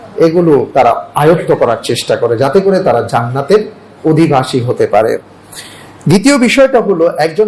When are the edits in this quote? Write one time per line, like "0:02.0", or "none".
none

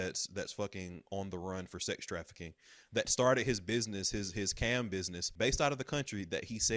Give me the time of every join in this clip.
0:05.3

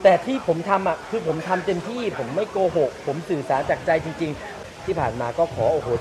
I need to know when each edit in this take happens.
0:04.6

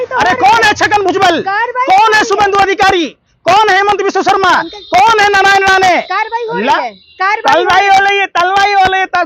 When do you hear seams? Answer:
none

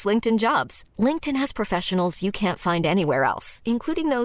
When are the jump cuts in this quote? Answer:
none

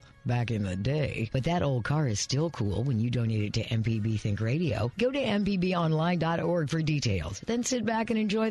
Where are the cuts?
none

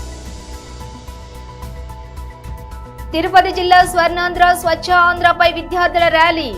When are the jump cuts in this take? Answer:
none

